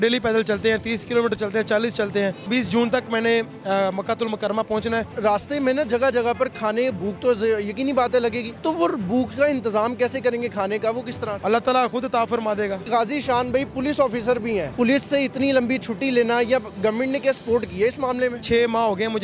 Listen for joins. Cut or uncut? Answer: cut